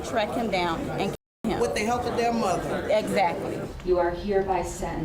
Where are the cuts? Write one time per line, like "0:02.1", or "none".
0:03.7